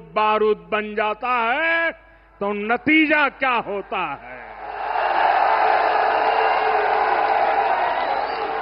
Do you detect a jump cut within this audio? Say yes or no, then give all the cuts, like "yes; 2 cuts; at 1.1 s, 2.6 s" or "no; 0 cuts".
no; 0 cuts